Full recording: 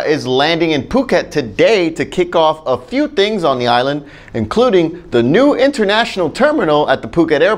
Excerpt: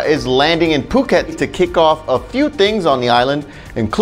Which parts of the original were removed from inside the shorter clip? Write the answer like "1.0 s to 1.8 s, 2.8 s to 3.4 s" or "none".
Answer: 1.3 s to 1.9 s